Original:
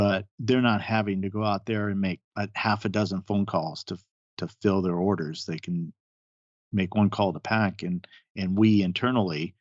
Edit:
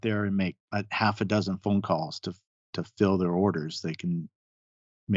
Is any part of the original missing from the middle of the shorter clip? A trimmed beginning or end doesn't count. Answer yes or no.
no